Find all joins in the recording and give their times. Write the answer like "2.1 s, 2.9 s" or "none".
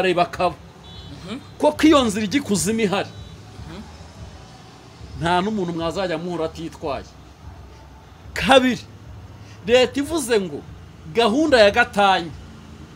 none